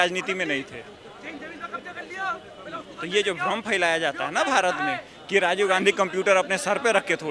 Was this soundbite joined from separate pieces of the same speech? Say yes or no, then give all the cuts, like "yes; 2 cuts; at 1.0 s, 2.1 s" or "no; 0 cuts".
no; 0 cuts